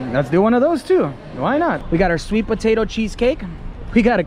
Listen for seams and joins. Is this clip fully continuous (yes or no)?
no